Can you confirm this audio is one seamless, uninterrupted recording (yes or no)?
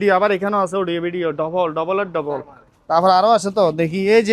yes